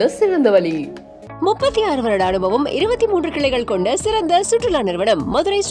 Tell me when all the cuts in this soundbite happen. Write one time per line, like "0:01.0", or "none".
none